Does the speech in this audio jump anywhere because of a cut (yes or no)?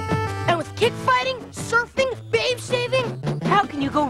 no